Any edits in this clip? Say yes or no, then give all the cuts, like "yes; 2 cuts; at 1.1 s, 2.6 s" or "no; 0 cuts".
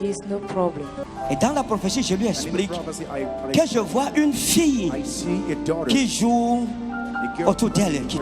yes; 1 cut; at 0.9 s